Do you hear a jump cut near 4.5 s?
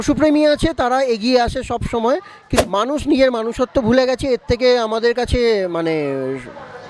no; 1 cut; at 2.4 s

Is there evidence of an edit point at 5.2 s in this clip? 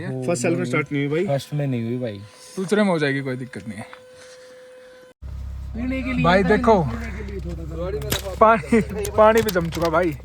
yes; 1 cut; at 5.2 s

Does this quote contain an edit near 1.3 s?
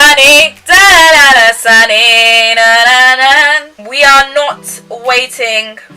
no; 1 cut; at 3.7 s

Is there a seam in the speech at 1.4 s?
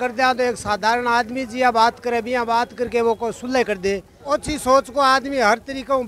no; 1 cut; at 4.1 s

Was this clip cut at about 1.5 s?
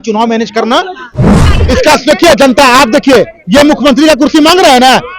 yes; 1 cut; at 1.5 s

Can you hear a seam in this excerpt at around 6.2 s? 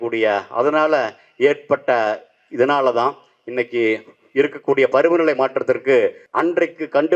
yes; 1 cut; at 6.2 s

